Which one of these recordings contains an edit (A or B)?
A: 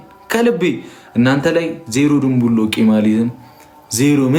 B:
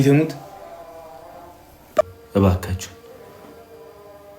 B